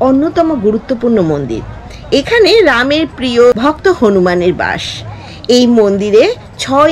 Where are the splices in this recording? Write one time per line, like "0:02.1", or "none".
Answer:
0:03.6